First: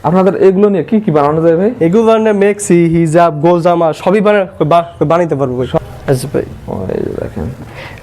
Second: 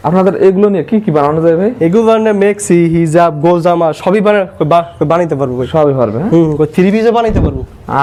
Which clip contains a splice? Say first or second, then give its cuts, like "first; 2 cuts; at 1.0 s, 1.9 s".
first; 1 cut; at 5.8 s